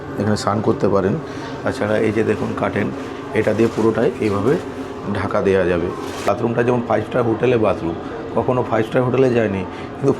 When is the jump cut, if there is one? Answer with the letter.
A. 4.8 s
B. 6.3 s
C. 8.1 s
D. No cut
B